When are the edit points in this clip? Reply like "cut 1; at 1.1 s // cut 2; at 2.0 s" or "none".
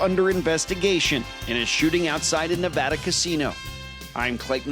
none